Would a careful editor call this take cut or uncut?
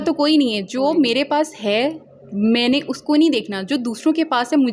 uncut